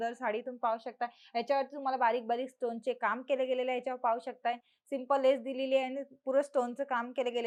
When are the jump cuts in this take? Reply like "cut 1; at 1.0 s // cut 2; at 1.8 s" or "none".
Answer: none